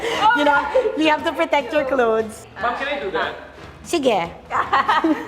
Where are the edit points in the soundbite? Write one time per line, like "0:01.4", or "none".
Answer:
0:02.3